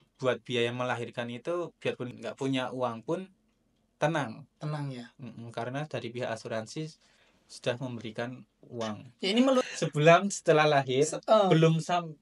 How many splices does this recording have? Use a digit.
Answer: 1